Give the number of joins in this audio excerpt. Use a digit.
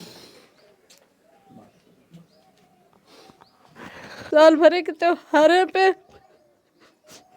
1